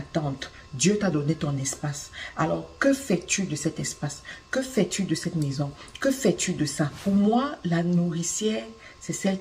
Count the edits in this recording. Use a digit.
1